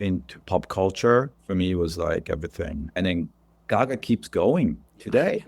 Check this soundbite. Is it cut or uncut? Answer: cut